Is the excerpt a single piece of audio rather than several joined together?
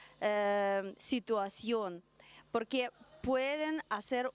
no; 1 cut; at 2.6 s

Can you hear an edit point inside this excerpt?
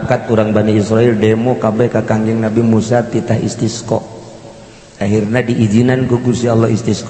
no; 0 cuts

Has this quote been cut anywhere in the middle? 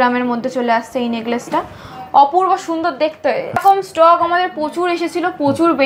yes; 1 cut; at 3.6 s

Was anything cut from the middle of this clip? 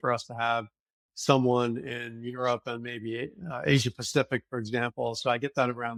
no; 0 cuts

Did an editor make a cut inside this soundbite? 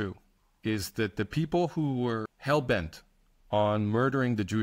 yes; 1 cut; at 2.3 s

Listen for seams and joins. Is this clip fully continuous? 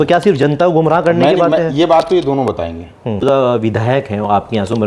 no; 1 cut; at 3.2 s

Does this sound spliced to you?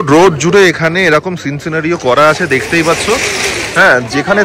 no; 0 cuts

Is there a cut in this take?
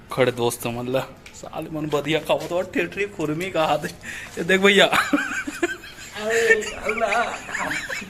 no; 0 cuts

